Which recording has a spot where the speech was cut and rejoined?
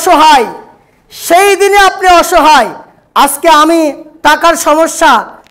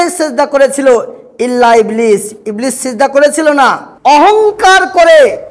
second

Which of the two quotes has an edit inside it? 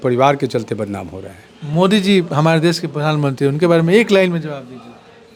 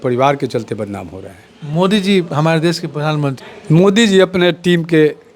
second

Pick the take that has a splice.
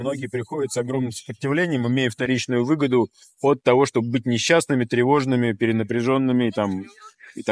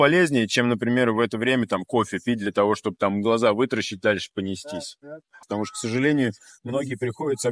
second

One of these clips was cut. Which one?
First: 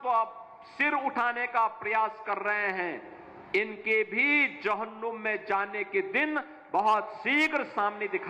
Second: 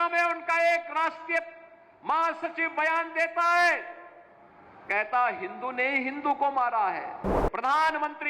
second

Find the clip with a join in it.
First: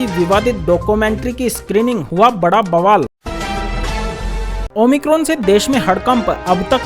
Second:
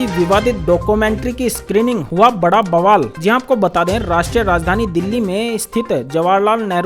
first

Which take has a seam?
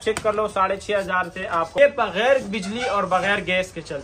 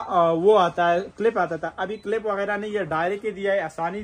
first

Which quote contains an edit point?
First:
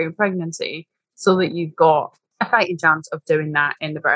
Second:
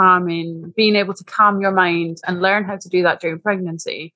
first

